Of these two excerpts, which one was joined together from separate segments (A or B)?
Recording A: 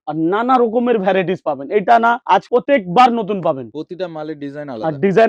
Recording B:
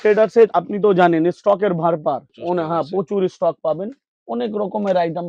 A